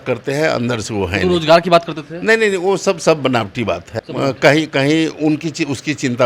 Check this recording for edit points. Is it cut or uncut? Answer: cut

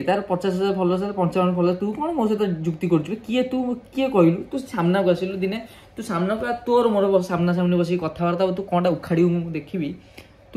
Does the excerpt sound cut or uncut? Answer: uncut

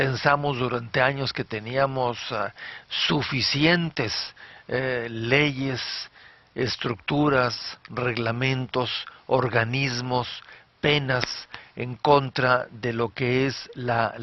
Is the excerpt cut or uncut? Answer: uncut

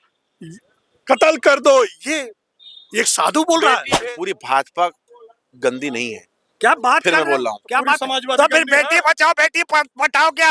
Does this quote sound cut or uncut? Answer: cut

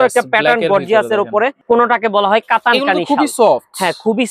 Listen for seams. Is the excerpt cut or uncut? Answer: cut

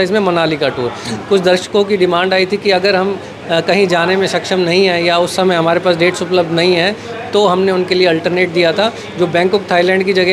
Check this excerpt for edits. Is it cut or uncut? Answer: uncut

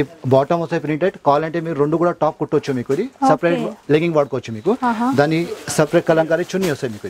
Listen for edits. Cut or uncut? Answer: uncut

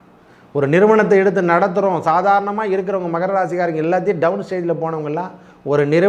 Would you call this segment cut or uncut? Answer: uncut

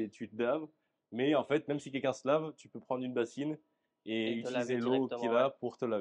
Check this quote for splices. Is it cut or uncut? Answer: uncut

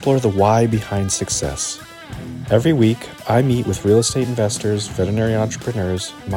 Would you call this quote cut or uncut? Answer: uncut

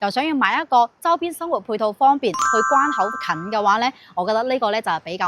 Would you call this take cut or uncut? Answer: cut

